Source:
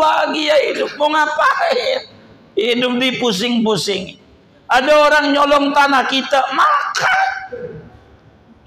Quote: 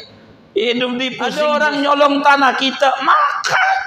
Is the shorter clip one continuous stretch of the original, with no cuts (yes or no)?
no